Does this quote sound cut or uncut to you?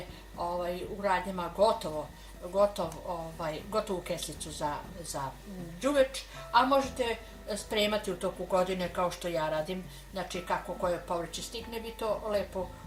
uncut